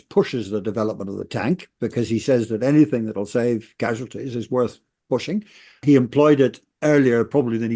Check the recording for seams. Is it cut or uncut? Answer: cut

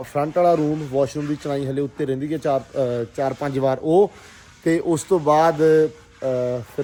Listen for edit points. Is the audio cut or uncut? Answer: uncut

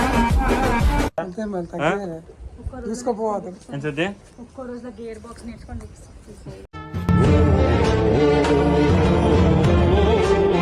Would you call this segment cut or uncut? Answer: uncut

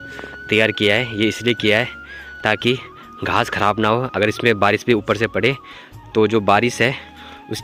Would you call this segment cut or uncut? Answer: uncut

